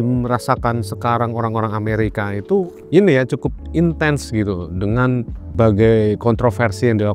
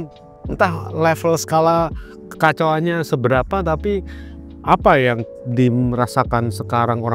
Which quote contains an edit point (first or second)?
first